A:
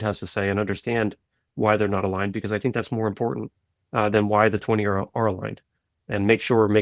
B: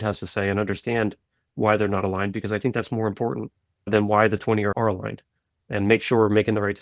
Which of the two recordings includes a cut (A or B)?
B